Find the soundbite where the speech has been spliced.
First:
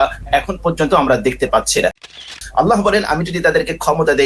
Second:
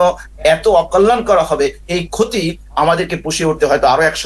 first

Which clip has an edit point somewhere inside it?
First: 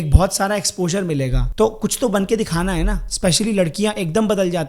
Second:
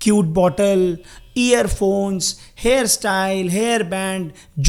first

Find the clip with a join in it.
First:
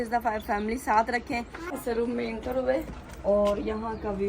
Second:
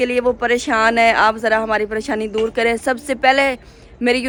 first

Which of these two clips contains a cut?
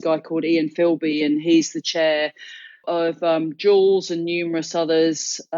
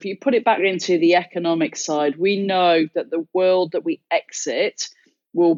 first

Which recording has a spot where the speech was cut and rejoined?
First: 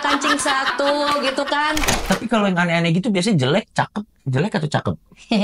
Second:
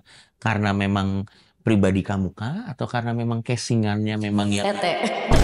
first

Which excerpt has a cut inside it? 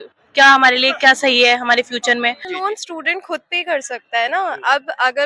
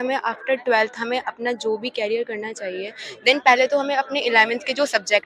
first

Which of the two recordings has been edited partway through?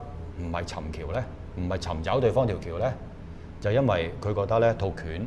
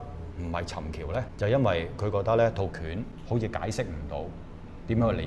second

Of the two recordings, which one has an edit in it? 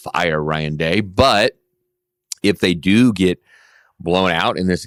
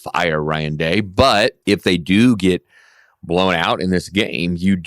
second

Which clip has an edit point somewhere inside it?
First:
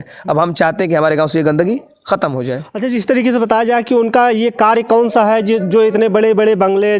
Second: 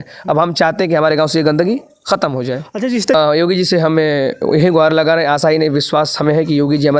second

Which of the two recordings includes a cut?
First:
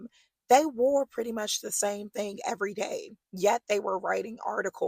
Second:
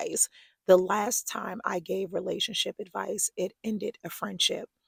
first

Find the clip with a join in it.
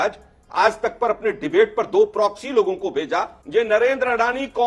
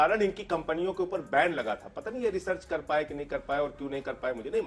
first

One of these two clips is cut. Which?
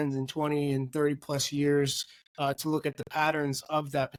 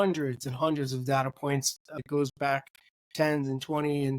second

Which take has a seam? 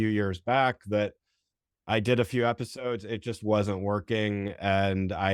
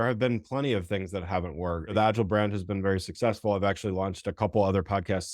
second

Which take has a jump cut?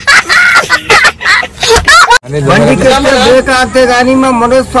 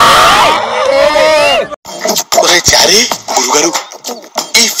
first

